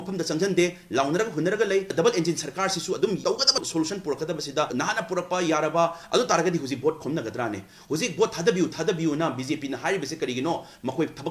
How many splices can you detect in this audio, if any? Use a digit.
0